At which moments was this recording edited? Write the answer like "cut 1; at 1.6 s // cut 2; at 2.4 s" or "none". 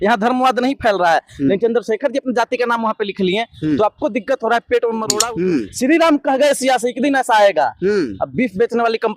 cut 1; at 5.2 s